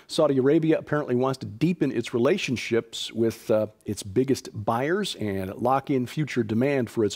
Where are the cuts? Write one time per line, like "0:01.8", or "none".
0:05.9